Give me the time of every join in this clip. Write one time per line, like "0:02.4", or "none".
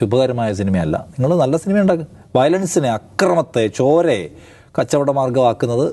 none

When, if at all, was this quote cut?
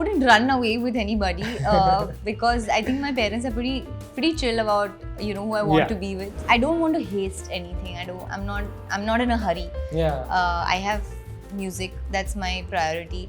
0:06.3

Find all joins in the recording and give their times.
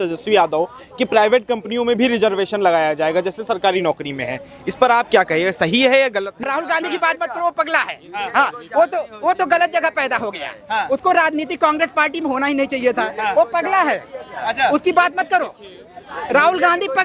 0:06.4

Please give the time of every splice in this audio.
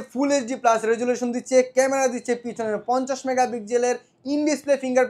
none

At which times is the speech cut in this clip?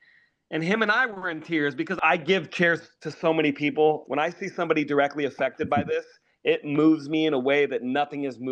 0:02.0
0:04.0

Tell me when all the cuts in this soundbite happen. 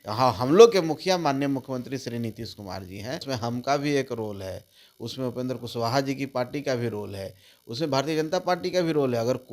0:03.3

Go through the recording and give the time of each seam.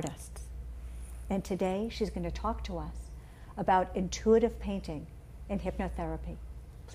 0:05.7

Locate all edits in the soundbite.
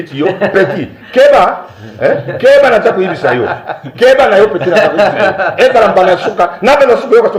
none

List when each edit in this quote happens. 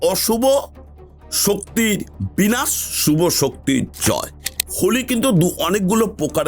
0:04.6

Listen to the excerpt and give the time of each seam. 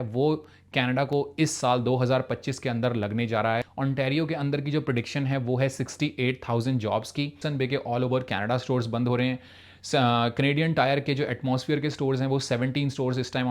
0:03.7
0:07.4

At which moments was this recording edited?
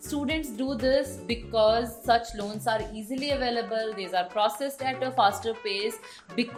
none

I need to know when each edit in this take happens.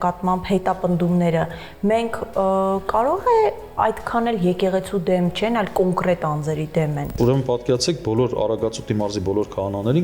0:07.1

